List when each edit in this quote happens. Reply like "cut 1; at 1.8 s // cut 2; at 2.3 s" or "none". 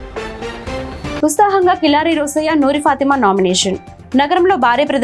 cut 1; at 1.2 s